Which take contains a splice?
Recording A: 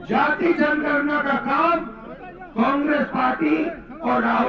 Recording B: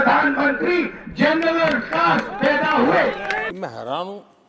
B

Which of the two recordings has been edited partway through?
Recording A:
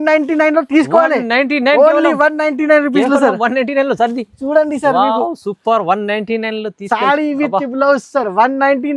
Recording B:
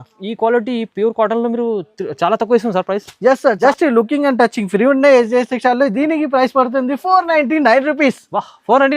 B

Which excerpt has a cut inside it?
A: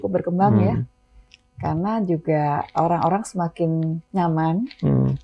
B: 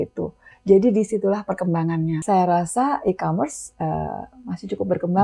B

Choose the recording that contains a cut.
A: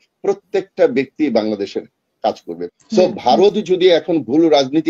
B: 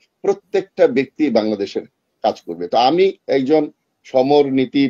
A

